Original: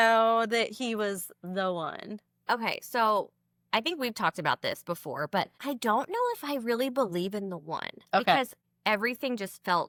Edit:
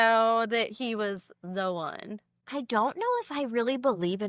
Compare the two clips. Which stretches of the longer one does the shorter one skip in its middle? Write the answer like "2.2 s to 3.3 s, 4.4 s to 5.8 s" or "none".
2.4 s to 5.5 s